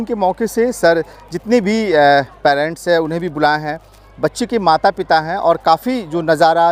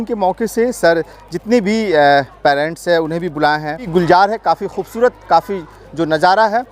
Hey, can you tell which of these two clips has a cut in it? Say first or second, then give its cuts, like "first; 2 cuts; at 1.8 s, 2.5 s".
second; 1 cut; at 3.8 s